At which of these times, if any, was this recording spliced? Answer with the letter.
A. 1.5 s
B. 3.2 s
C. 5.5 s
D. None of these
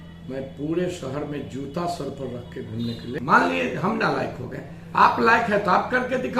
B